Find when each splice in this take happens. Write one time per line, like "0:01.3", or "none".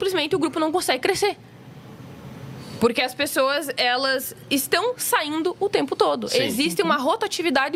none